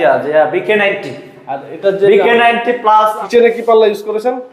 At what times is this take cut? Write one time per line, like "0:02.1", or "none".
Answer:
0:03.2